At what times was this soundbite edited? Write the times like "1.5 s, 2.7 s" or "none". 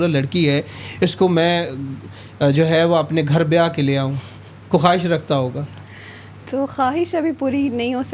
none

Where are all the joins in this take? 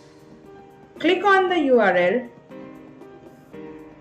0.9 s, 2.4 s

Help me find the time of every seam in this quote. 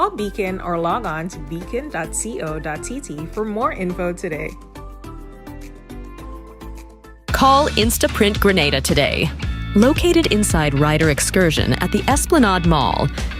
7.1 s

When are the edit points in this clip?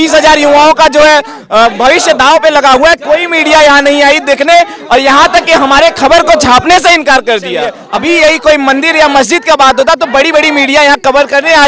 7.8 s

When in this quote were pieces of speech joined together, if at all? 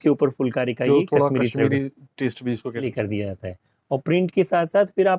2.9 s

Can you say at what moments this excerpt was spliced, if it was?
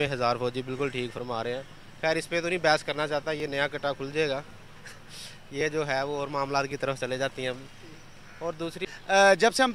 8.7 s

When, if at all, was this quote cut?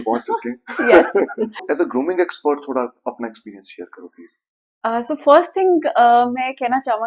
1.6 s

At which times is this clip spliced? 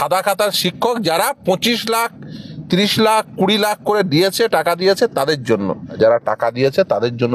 5.9 s

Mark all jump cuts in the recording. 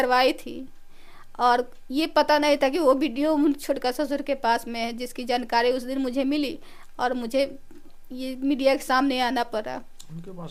none

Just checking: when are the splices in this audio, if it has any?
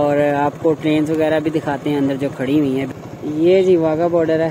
2.9 s

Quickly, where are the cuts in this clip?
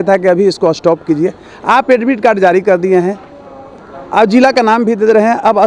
none

